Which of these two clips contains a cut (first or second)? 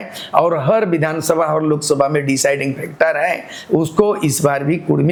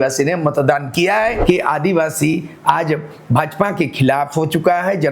second